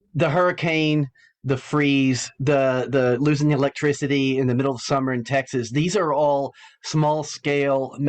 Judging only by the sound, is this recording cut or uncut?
uncut